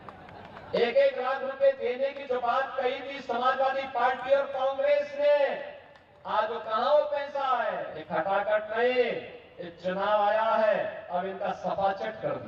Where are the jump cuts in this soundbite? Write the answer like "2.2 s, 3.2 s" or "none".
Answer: 7.9 s